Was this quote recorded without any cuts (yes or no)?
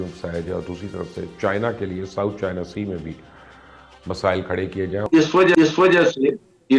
no